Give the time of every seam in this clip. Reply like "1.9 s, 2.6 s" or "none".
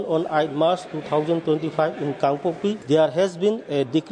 2.8 s